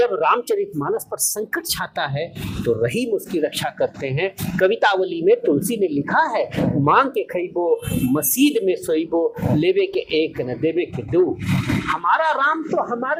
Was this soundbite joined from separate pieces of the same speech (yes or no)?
no